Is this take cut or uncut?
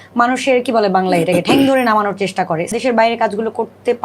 cut